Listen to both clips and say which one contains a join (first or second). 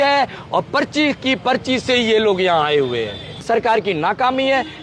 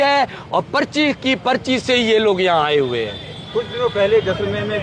first